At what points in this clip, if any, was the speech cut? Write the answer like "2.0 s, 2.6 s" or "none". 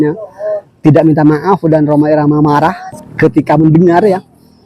2.9 s